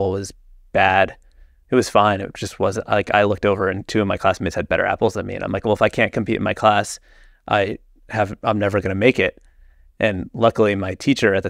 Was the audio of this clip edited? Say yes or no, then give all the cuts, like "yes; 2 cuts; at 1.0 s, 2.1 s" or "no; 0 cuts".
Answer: no; 0 cuts